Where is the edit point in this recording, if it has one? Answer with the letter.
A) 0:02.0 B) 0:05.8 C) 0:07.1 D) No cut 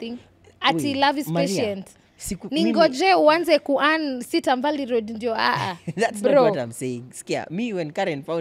D